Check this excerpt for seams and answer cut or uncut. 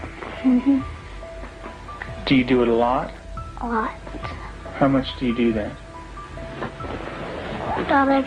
uncut